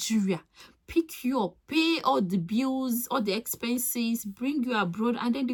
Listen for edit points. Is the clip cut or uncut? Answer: uncut